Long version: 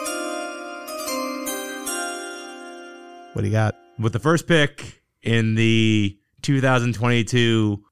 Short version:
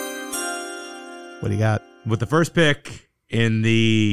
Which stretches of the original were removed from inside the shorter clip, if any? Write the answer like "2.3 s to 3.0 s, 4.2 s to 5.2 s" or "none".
2.8 s to 3.2 s